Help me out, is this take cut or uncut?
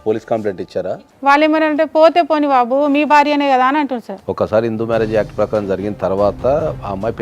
cut